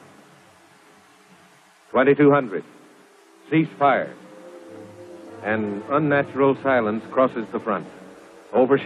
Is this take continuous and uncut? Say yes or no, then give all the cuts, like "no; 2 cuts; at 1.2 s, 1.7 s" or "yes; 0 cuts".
yes; 0 cuts